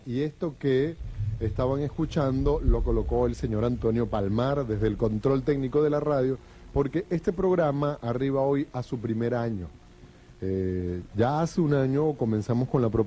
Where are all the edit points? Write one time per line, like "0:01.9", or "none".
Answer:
0:10.7